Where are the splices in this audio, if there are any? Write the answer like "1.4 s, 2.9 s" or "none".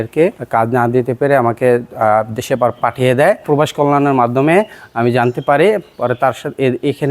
3.4 s